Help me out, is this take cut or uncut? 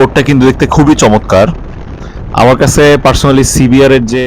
uncut